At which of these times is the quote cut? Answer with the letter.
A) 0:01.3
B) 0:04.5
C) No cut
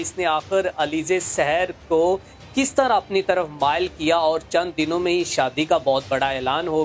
C